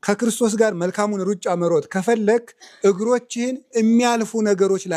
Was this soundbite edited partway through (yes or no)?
no